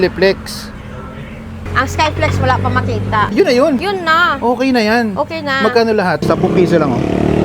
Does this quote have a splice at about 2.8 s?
no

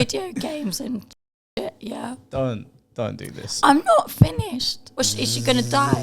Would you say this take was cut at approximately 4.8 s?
yes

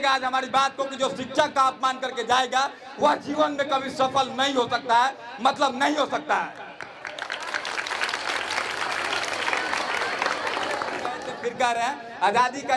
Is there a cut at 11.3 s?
yes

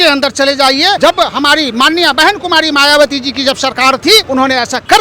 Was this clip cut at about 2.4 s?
no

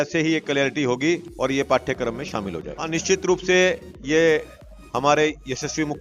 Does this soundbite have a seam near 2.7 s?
yes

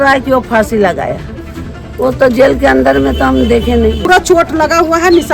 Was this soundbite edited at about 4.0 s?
yes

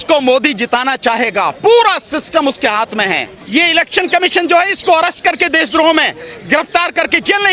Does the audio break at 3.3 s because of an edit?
yes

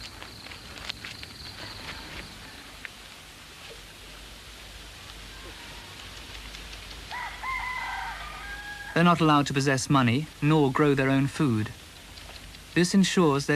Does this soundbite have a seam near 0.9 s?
no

